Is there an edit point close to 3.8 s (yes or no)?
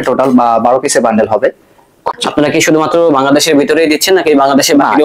no